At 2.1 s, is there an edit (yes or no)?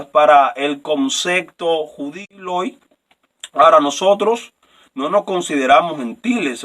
yes